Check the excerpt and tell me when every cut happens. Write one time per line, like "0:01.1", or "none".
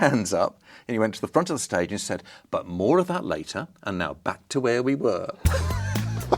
none